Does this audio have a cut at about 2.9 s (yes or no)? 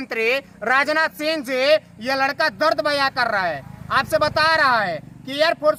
no